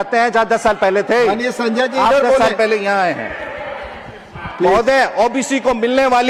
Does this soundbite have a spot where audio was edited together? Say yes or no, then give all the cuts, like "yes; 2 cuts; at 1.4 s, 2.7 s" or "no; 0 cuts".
no; 0 cuts